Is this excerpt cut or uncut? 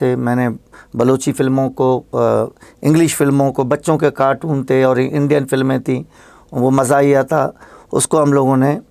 uncut